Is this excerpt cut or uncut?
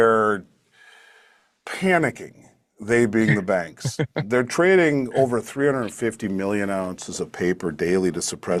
uncut